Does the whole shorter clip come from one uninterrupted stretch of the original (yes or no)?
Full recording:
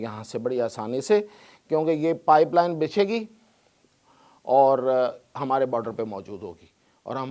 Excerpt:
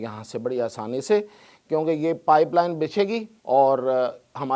no